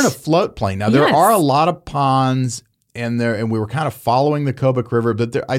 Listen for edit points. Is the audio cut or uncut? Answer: uncut